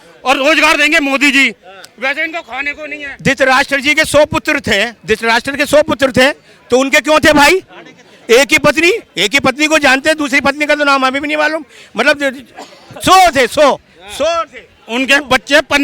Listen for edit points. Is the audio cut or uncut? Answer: cut